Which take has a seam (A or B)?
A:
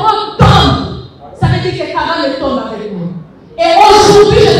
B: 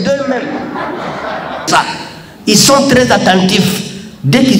B